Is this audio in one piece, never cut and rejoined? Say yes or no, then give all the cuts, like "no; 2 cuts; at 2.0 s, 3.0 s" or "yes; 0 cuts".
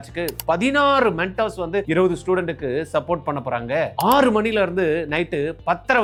yes; 0 cuts